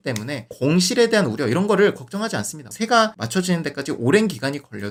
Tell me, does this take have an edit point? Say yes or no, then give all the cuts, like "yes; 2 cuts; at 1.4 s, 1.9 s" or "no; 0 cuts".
no; 0 cuts